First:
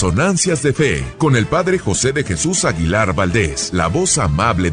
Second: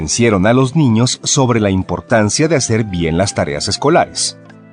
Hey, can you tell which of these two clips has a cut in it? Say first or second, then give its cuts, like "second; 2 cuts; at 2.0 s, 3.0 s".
first; 2 cuts; at 1.1 s, 3.6 s